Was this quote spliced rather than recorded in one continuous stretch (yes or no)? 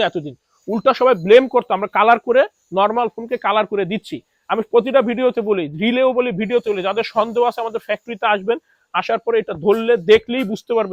no